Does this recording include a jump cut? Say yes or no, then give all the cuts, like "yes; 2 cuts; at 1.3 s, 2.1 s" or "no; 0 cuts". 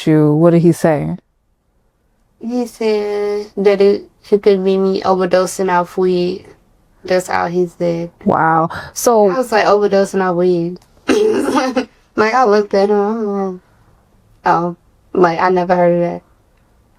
no; 0 cuts